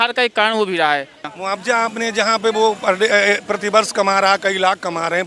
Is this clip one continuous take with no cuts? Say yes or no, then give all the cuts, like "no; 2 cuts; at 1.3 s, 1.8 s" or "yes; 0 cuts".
no; 1 cut; at 1.3 s